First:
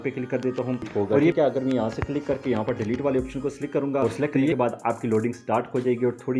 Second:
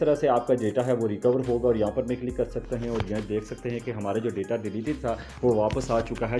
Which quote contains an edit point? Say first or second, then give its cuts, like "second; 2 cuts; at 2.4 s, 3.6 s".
first; 2 cuts; at 1.3 s, 4.5 s